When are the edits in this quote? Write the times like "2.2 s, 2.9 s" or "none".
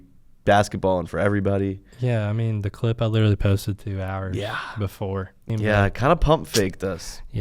5.5 s